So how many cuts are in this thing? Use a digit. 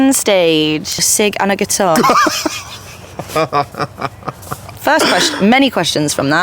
1